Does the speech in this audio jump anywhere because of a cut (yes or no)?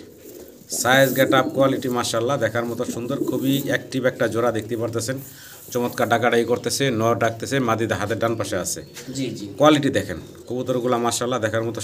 no